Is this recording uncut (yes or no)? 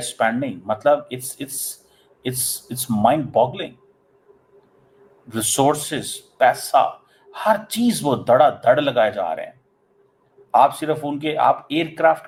yes